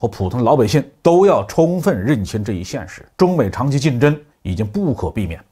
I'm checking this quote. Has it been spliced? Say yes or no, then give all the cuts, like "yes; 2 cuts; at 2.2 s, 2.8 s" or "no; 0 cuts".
no; 0 cuts